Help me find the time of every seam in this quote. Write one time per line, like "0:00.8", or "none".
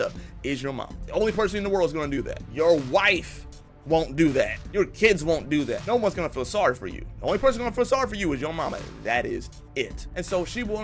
0:00.9
0:02.4
0:04.6
0:05.8
0:10.0